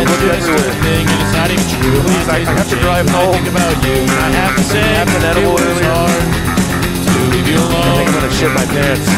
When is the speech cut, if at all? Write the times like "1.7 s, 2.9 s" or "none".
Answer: none